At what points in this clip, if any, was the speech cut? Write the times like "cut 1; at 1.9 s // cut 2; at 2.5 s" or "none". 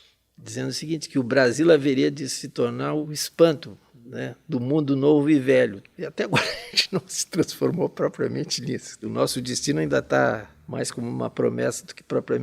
cut 1; at 3.1 s // cut 2; at 5.9 s // cut 3; at 9.1 s // cut 4; at 10.6 s